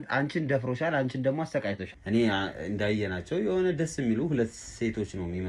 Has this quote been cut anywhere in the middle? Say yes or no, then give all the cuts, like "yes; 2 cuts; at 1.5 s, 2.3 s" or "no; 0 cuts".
yes; 1 cut; at 1.9 s